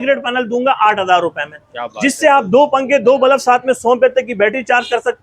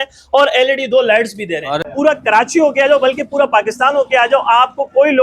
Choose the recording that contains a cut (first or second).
second